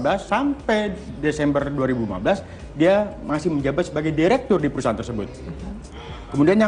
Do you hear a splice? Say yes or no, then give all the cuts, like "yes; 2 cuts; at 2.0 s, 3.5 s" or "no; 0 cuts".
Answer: yes; 1 cut; at 4.9 s